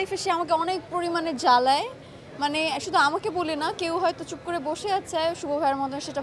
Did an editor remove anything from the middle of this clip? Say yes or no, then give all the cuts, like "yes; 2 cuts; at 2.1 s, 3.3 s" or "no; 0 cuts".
no; 0 cuts